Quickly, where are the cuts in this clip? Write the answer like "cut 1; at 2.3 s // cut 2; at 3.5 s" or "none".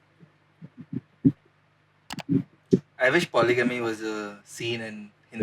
none